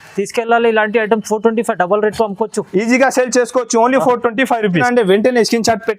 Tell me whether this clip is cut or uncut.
cut